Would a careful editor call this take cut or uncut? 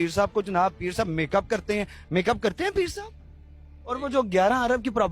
cut